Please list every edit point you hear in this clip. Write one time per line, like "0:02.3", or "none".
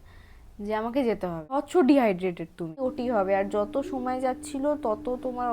0:01.5
0:02.8